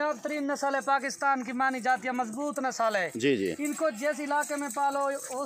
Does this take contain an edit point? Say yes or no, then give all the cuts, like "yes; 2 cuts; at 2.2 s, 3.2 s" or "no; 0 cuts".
no; 0 cuts